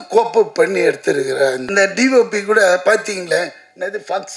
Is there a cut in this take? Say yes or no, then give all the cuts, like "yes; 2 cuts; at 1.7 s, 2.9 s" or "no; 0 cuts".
yes; 1 cut; at 1.6 s